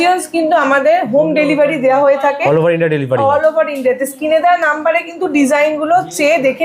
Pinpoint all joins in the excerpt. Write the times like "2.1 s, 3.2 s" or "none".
none